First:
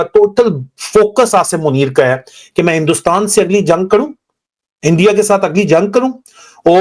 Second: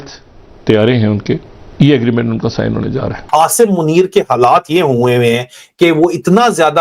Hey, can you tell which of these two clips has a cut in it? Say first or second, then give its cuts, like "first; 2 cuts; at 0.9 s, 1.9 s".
second; 2 cuts; at 1.6 s, 3.1 s